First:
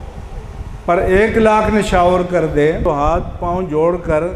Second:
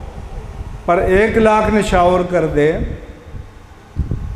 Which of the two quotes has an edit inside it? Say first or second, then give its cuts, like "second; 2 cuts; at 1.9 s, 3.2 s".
first; 1 cut; at 2.8 s